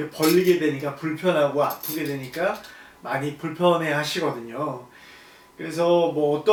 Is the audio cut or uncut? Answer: uncut